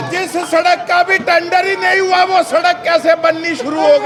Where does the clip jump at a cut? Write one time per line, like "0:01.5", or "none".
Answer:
none